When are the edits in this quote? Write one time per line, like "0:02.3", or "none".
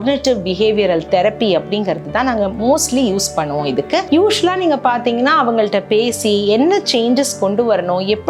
none